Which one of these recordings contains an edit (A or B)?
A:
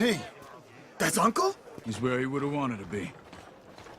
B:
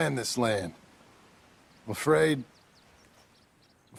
A